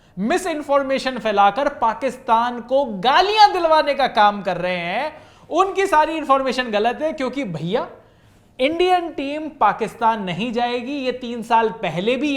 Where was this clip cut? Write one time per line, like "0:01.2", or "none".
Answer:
none